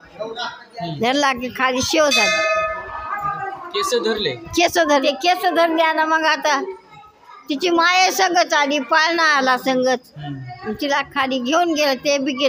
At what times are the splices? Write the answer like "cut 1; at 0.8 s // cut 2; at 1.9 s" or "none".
none